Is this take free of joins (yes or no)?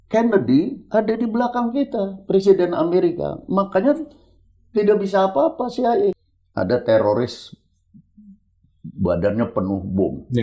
no